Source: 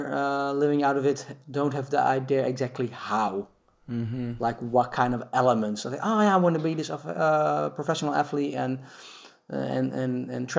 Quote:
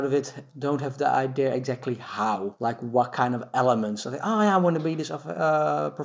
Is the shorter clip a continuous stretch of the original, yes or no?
no